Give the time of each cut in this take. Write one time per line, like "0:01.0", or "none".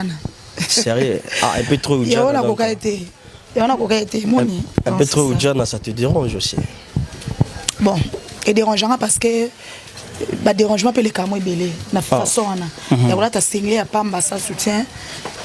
none